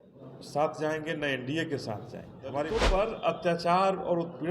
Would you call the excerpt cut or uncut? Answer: cut